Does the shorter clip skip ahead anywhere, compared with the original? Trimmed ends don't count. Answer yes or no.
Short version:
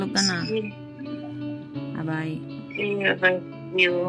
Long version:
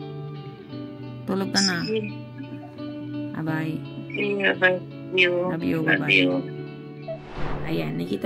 no